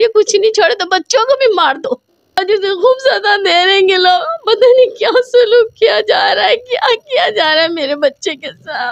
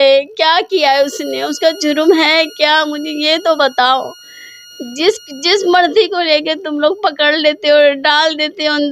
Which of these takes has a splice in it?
first; 1 cut; at 2.4 s

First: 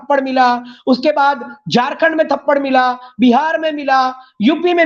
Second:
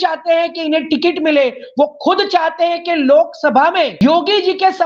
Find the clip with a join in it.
second; 1 cut; at 3.9 s

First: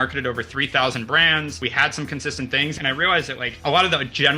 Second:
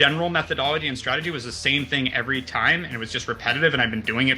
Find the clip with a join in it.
first; 2 cuts; at 1.5 s, 3.2 s

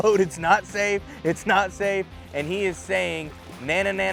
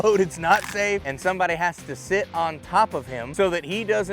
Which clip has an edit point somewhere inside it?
second; 2 cuts; at 1.1 s, 3.2 s

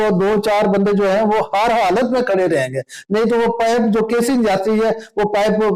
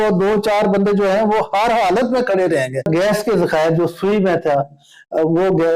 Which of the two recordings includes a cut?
second; 1 cut; at 2.9 s

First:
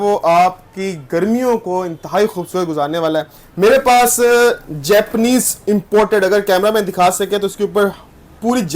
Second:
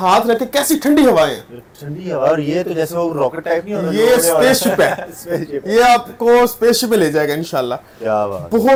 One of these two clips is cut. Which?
first; 1 cut; at 3.4 s

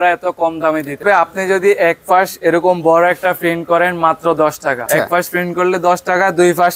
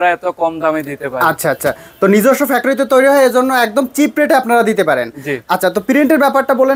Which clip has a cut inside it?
first; 2 cuts; at 1.0 s, 4.9 s

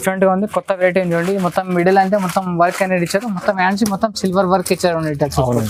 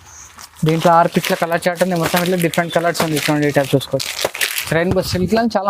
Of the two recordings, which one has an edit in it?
second; 1 cut; at 4.6 s

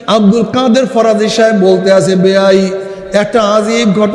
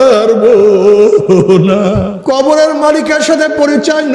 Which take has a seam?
second; 1 cut; at 2.1 s

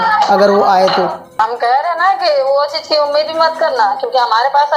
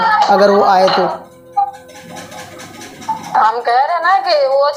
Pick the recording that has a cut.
first; 1 cut; at 1.4 s

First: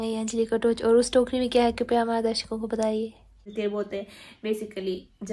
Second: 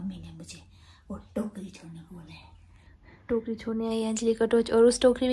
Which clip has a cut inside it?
first; 1 cut; at 3.5 s

